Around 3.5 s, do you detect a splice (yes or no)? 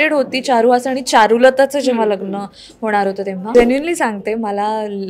yes